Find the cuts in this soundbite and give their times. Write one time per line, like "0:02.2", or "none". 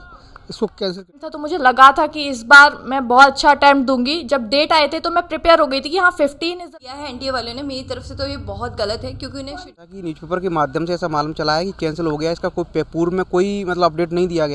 0:01.3
0:06.7
0:09.8